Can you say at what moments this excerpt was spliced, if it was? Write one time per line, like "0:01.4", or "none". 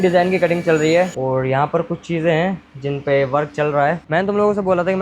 0:01.1
0:04.0